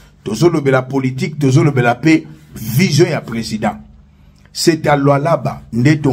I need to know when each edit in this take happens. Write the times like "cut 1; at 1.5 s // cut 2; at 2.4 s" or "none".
none